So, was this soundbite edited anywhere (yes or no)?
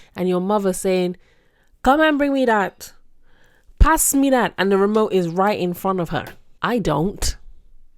yes